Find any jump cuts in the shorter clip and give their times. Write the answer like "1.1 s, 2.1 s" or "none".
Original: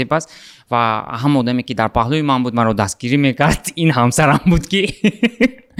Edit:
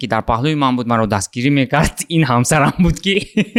none